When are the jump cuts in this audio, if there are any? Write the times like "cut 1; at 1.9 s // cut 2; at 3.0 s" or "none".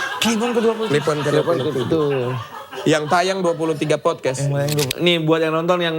cut 1; at 4.9 s